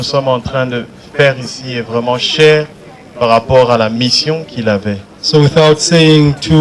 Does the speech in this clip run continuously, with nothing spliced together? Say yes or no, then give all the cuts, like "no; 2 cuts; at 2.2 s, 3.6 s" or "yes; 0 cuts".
yes; 0 cuts